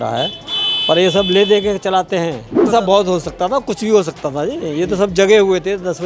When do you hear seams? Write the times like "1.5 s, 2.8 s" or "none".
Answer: 2.7 s